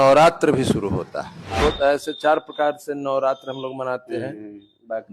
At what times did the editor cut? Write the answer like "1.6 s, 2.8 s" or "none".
1.6 s